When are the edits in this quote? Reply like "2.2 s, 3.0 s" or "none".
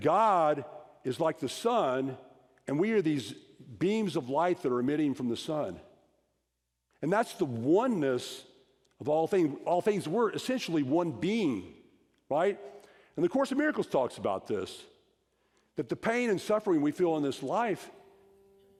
none